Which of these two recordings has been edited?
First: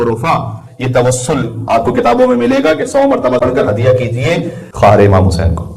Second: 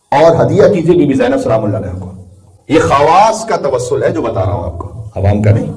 first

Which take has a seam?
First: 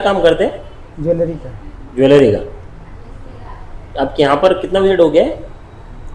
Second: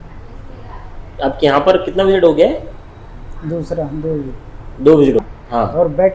second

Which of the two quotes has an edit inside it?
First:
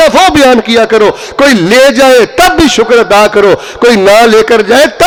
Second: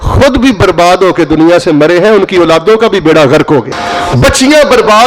second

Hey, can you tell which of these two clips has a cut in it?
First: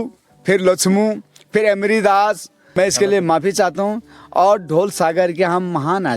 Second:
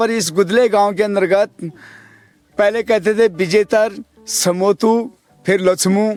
first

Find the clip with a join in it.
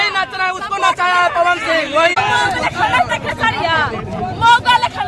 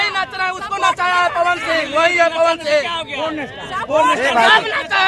first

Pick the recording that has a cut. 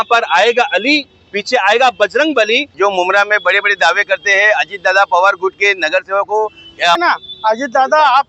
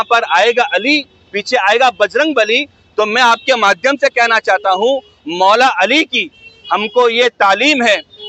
first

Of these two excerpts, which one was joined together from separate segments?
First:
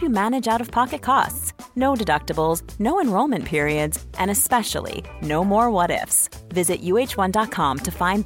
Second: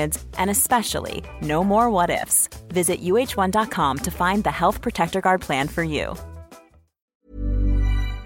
second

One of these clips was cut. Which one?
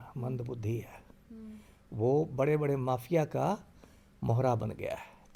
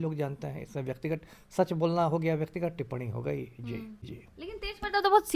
second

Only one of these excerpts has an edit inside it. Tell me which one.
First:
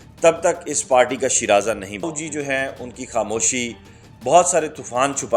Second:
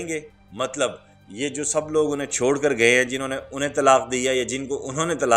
first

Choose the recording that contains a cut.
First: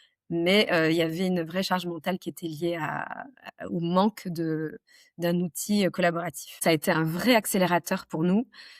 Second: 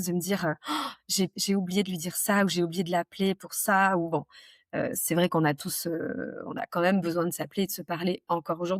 first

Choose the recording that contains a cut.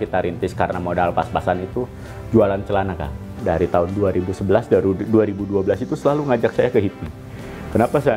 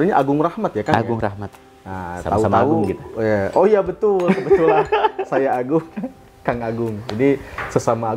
first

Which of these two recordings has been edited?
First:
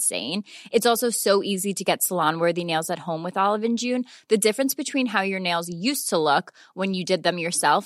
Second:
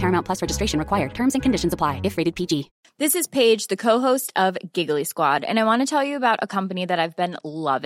second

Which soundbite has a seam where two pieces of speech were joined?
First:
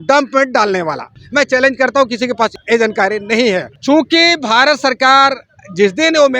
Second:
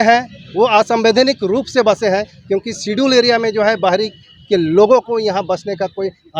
first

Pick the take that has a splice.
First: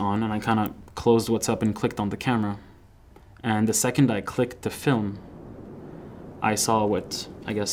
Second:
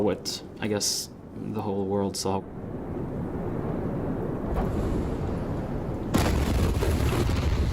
second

